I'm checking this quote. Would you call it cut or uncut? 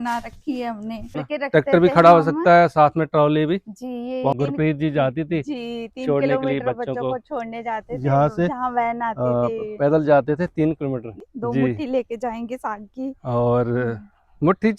cut